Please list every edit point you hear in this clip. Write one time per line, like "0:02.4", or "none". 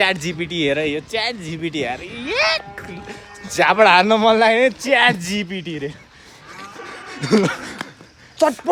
none